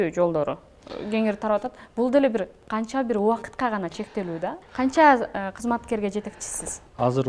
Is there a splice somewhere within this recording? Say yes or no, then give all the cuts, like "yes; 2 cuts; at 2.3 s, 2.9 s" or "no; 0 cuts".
yes; 1 cut; at 4.6 s